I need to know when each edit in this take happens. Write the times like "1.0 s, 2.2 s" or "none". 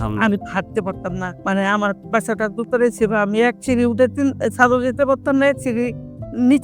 1.3 s